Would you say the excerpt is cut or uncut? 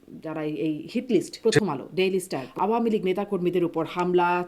cut